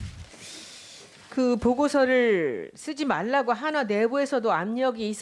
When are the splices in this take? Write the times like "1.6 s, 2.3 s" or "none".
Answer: 1.6 s

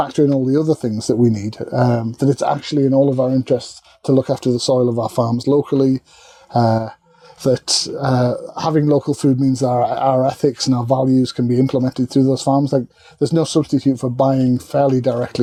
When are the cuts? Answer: none

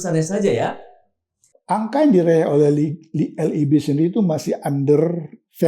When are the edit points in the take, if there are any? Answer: 1.5 s

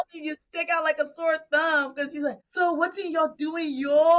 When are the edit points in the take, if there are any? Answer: 2.4 s

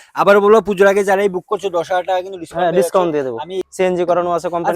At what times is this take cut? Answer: 3.6 s

